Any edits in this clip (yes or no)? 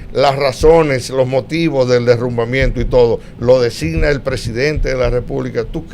no